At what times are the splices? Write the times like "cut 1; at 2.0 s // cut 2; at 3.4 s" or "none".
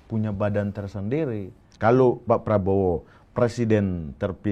cut 1; at 1.6 s